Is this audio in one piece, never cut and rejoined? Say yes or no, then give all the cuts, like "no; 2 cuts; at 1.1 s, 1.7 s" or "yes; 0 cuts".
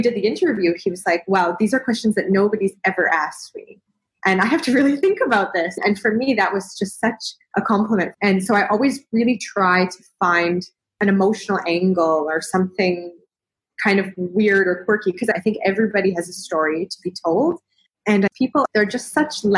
no; 4 cuts; at 7.3 s, 8.1 s, 15.3 s, 18.3 s